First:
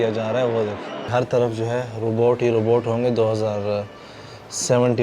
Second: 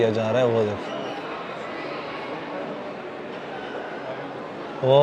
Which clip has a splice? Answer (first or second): first